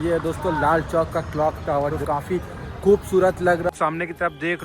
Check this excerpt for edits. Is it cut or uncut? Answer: cut